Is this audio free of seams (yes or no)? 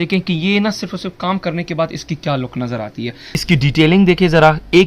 no